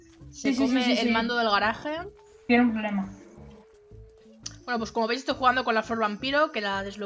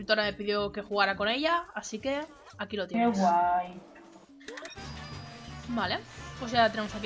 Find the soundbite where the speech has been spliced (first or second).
first